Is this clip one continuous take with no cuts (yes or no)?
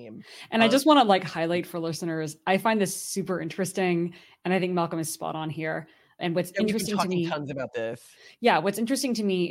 yes